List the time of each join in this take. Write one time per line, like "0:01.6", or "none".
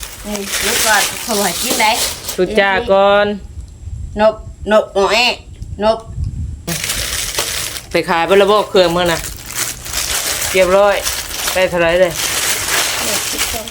0:06.7

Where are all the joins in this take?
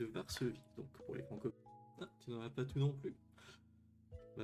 0:01.6

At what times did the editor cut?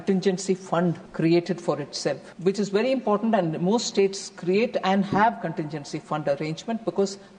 0:01.1
0:02.3

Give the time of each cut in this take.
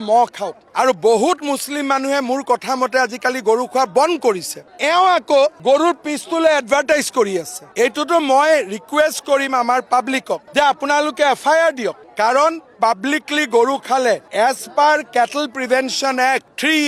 none

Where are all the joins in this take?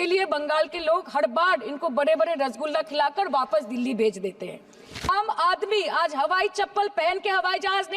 0:05.1

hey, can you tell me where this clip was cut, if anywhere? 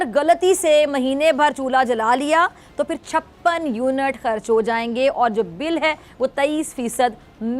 none

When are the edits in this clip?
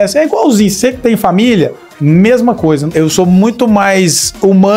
0:02.9

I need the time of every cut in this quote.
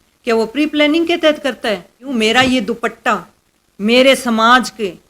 0:02.0

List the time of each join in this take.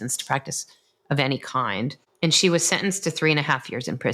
0:02.0

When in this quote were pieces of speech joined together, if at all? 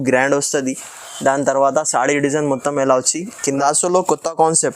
0:03.6

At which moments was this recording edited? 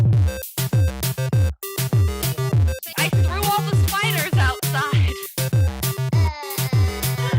0:01.9

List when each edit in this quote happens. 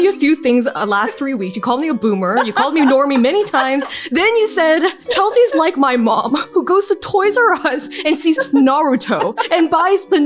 0:05.0

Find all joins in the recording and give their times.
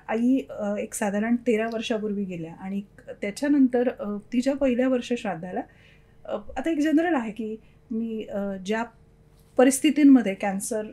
none

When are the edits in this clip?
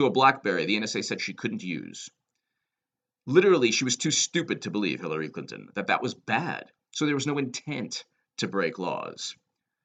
none

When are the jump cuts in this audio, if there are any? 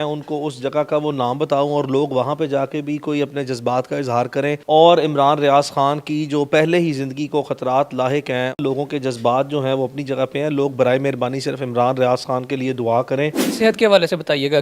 0:04.6
0:08.6
0:13.4

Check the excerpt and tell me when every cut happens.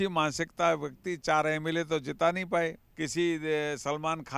0:02.9

